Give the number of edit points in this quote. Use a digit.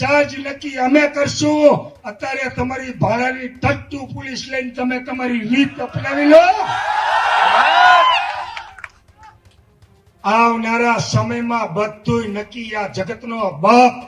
0